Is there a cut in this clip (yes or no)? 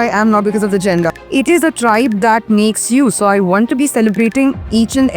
yes